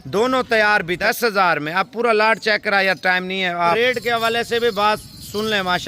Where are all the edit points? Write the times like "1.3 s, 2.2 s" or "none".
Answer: 1.0 s, 3.8 s